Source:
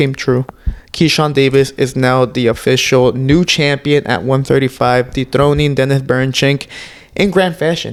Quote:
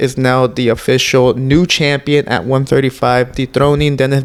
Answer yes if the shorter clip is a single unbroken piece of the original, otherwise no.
yes